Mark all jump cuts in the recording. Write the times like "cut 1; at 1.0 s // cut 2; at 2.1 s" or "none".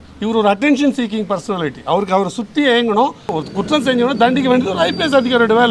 cut 1; at 3.4 s